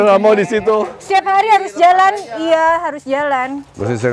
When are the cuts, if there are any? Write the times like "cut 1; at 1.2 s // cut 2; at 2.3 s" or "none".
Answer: cut 1; at 1.0 s